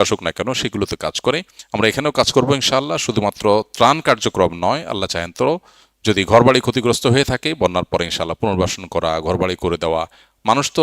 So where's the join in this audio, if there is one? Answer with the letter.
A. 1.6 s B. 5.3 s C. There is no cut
A